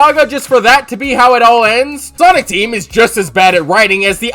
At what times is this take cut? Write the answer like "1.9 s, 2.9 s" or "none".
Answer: 2.0 s